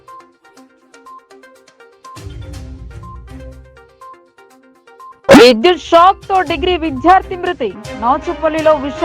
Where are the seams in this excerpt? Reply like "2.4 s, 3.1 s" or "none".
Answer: 1.6 s